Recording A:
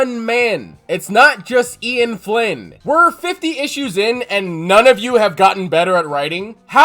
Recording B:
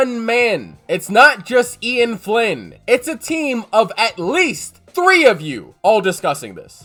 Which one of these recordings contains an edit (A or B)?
A